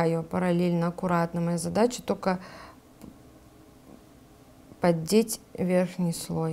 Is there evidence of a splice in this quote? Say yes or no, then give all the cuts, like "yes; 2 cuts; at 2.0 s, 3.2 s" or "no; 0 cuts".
no; 0 cuts